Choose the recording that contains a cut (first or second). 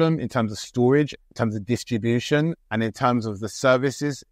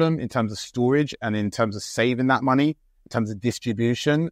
first